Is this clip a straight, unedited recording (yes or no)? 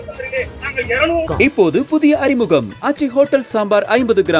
no